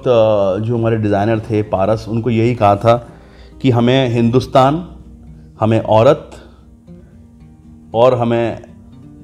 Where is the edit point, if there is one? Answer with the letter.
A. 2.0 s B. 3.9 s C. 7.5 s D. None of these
D